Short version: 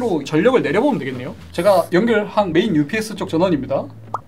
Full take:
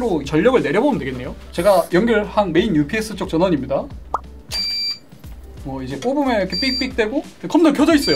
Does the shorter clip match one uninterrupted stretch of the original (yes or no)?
yes